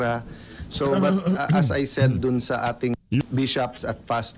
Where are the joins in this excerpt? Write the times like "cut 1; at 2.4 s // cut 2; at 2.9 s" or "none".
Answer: cut 1; at 3.2 s